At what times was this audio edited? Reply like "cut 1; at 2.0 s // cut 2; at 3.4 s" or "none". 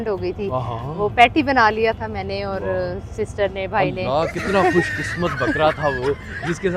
none